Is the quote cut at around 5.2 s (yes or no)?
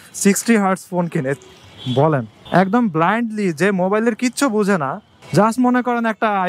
no